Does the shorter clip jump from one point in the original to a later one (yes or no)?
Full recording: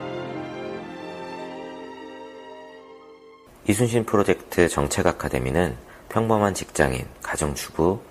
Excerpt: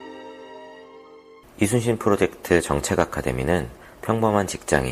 yes